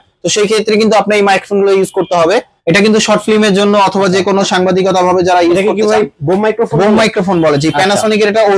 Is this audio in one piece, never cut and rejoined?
no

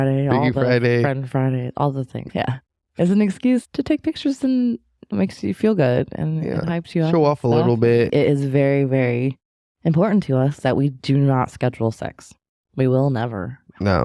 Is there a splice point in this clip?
yes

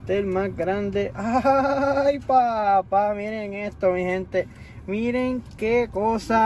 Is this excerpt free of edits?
yes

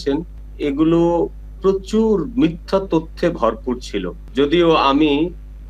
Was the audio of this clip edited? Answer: no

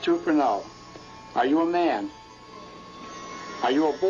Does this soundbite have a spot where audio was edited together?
no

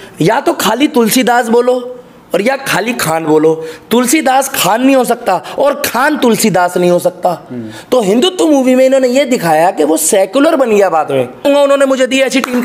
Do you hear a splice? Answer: yes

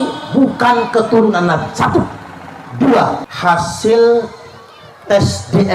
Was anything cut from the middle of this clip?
yes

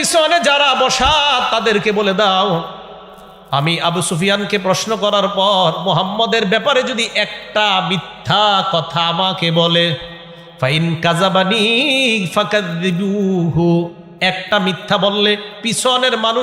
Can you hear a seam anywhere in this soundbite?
no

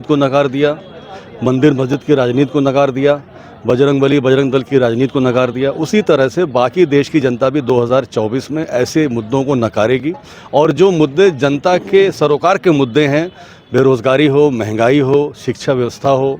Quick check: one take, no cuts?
yes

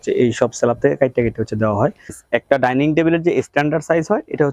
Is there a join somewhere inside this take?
yes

